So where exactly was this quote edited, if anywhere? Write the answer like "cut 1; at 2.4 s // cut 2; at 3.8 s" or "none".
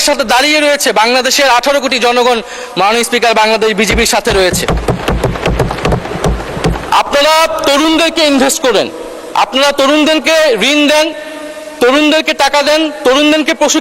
cut 1; at 6.9 s